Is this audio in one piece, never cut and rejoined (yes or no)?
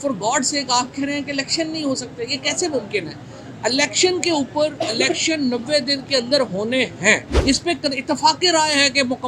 no